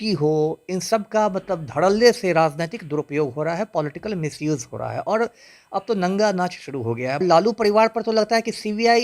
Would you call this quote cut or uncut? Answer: cut